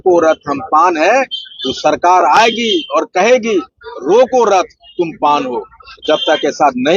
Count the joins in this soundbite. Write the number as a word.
zero